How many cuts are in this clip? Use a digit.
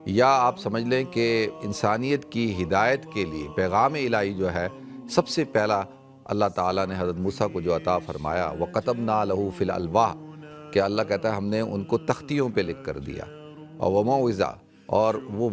0